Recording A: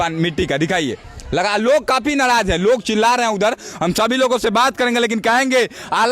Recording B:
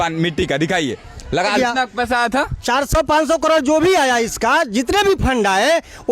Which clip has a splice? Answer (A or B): B